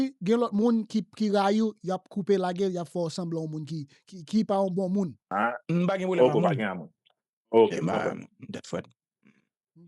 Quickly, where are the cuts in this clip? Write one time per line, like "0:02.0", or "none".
0:05.3